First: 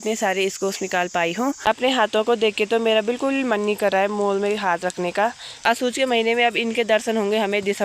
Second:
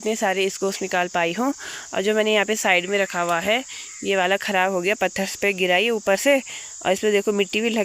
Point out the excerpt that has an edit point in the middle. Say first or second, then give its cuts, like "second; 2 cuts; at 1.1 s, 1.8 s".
first; 2 cuts; at 1.6 s, 5.7 s